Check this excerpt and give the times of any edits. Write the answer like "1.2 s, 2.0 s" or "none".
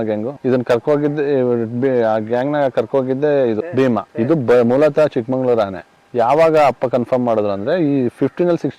none